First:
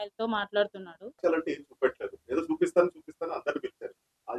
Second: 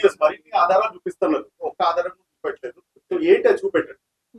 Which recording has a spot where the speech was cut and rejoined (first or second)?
first